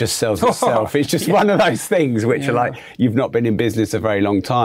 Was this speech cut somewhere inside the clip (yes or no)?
no